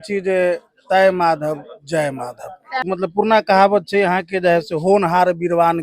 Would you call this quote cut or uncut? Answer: cut